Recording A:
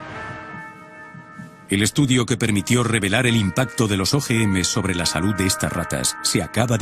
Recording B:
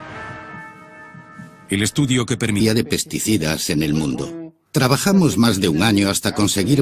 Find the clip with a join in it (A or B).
A